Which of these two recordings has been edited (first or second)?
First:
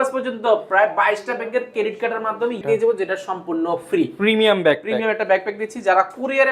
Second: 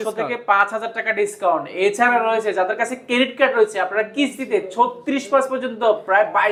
first